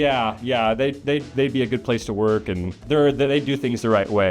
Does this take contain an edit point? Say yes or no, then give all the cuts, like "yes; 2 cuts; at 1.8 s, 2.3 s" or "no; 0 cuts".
yes; 1 cut; at 2.7 s